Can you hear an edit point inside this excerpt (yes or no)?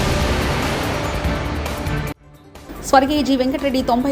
no